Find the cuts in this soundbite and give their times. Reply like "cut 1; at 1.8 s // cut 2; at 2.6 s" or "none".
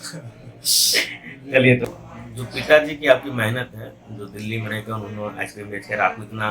cut 1; at 1.8 s